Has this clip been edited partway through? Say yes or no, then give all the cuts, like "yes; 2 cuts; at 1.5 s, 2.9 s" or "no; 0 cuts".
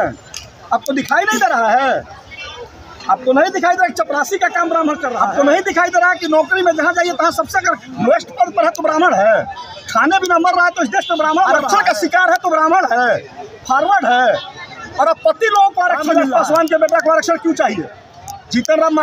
yes; 3 cuts; at 5.1 s, 11.6 s, 16.1 s